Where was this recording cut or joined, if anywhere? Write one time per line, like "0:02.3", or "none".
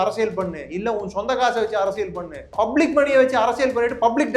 0:02.5